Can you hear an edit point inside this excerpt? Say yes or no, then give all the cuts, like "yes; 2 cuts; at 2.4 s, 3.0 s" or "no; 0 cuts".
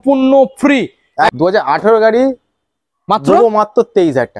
yes; 1 cut; at 1.3 s